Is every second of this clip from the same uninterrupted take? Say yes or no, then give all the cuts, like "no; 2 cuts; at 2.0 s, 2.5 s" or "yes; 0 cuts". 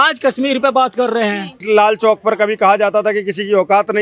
no; 1 cut; at 1.6 s